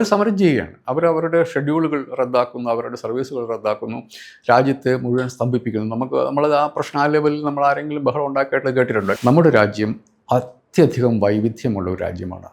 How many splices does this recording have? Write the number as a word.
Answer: one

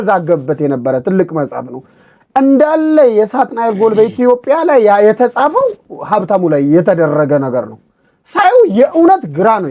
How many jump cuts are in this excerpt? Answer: zero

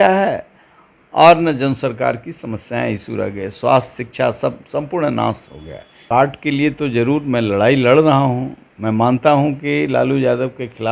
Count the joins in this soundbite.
one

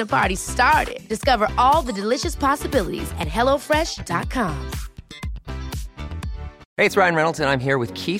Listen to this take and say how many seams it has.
one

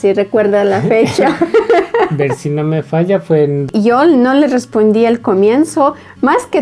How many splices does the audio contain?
one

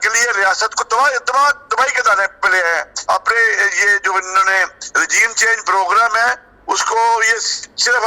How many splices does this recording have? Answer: zero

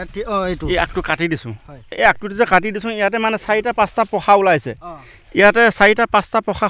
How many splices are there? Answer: one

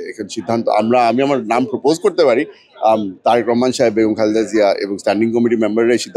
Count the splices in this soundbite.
zero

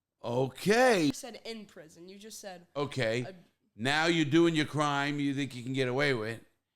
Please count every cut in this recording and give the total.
one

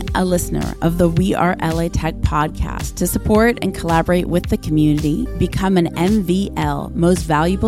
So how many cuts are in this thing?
zero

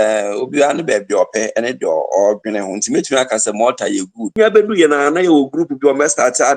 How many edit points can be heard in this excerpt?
one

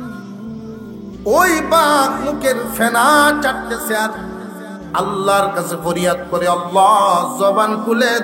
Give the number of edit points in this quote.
one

